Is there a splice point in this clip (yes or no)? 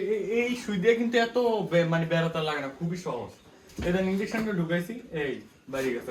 no